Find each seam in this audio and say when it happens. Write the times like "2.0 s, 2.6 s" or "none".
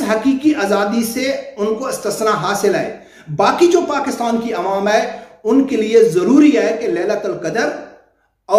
none